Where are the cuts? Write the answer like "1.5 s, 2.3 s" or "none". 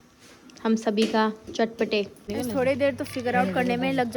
2.2 s